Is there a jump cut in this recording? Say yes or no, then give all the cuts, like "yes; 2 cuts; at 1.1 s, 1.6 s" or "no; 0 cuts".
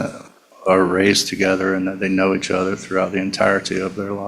no; 0 cuts